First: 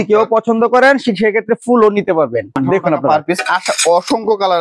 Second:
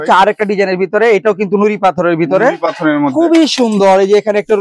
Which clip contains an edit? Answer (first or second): first